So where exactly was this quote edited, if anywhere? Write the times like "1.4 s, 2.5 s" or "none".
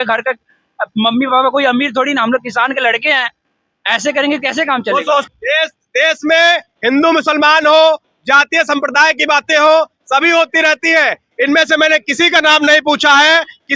5.3 s